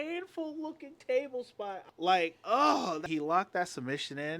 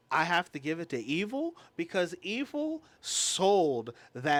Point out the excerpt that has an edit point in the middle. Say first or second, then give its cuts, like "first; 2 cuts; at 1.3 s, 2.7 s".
first; 2 cuts; at 1.8 s, 3.0 s